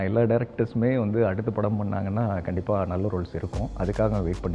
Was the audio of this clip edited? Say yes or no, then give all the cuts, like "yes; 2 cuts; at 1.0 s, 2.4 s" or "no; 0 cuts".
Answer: no; 0 cuts